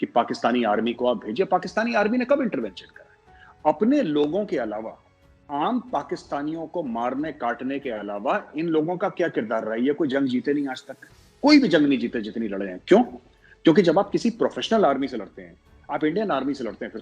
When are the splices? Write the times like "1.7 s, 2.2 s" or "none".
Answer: none